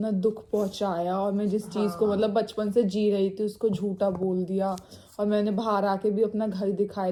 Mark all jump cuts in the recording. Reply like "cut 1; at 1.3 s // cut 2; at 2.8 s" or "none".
none